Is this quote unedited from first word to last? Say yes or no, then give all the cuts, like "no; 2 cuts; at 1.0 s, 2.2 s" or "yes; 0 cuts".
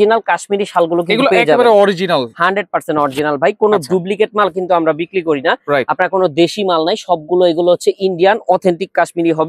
yes; 0 cuts